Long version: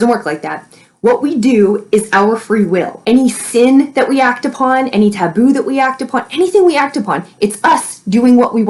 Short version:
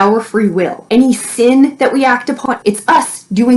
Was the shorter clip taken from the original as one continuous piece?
no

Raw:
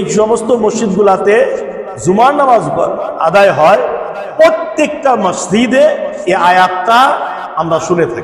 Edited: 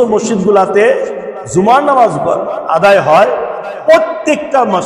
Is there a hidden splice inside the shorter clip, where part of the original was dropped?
no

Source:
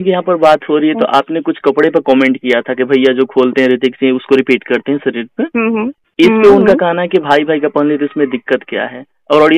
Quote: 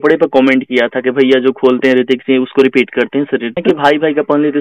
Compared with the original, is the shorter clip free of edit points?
no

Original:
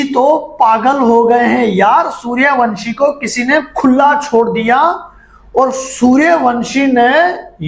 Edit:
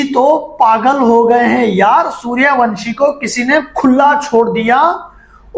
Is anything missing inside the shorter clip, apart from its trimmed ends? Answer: no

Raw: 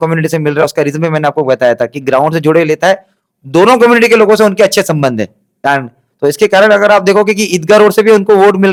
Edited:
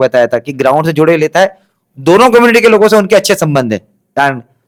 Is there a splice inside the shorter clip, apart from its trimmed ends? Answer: no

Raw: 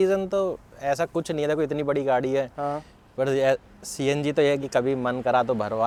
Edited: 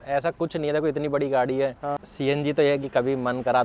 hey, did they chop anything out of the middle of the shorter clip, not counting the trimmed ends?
yes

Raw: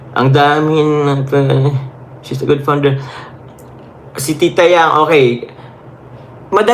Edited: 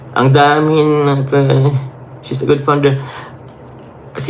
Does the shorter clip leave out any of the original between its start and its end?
no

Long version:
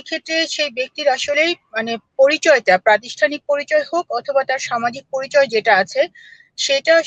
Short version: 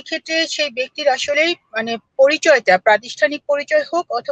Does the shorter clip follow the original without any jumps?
yes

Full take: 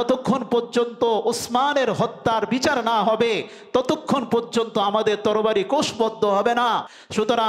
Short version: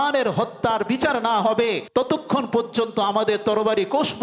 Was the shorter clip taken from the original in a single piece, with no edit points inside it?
no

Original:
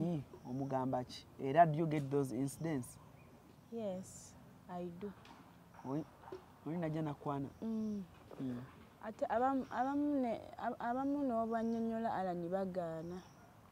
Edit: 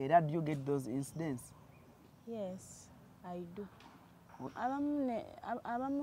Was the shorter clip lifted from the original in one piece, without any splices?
no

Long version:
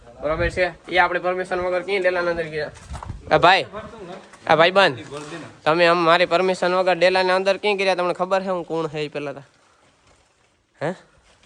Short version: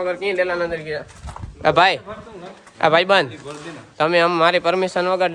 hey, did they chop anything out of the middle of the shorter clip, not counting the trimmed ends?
no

